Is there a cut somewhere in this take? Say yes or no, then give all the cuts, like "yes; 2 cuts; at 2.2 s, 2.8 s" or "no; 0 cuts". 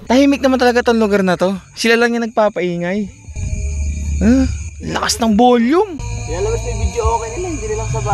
no; 0 cuts